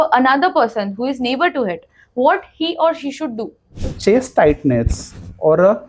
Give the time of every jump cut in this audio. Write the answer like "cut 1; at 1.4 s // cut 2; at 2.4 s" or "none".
cut 1; at 3.9 s